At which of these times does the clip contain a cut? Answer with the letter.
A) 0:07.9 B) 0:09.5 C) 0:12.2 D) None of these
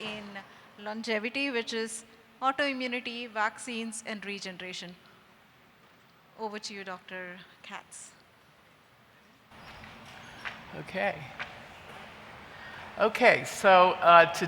B